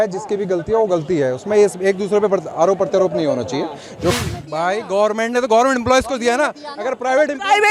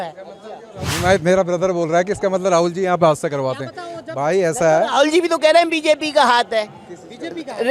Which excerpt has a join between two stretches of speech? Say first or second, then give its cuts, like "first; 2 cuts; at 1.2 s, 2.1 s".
first; 1 cut; at 4.1 s